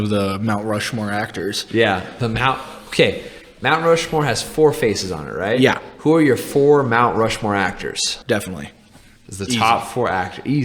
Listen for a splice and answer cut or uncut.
cut